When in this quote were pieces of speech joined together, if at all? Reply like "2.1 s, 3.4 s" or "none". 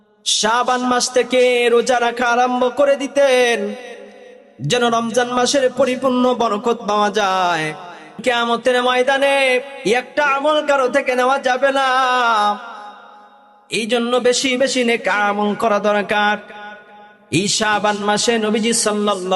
8.2 s